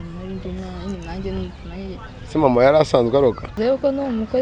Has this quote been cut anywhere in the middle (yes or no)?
yes